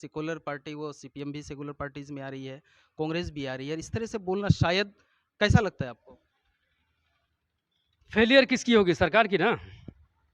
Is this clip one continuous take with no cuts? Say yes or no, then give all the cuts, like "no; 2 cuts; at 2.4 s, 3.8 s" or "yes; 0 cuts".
yes; 0 cuts